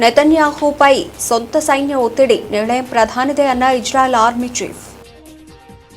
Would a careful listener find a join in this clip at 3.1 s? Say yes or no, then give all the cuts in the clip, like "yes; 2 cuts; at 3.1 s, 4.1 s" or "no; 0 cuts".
no; 1 cut; at 4.9 s